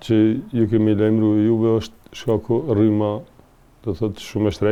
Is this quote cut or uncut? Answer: uncut